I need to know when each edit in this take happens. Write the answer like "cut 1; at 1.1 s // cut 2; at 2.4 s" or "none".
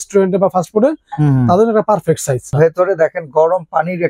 cut 1; at 2.5 s